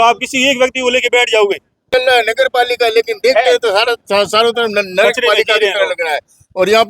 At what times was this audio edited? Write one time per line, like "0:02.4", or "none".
0:01.9